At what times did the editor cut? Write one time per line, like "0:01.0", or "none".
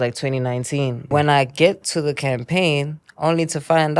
0:01.1